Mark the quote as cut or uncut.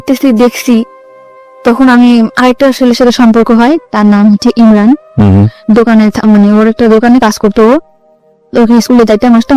uncut